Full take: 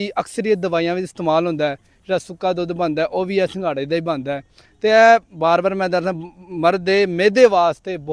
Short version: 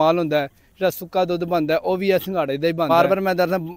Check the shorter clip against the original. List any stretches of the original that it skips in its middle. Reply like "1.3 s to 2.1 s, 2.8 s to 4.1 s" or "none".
4.1 s to 5.4 s